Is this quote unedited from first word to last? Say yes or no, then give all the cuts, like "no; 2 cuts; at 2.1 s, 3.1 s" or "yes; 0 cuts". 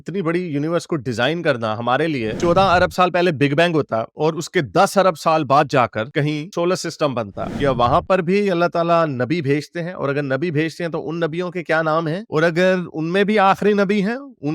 no; 2 cuts; at 2.3 s, 7.5 s